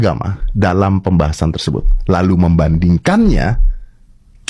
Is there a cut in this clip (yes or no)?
no